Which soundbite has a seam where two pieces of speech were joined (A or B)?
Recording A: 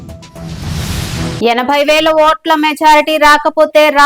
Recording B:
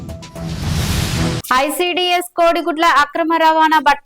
B